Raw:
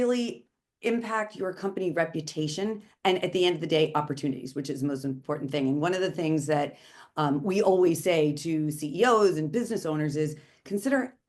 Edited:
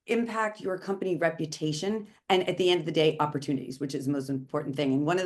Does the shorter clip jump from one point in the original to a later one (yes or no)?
no